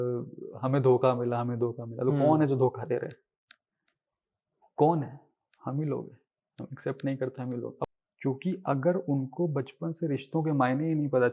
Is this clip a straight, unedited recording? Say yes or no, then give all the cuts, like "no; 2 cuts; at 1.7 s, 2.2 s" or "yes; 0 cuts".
no; 1 cut; at 7.9 s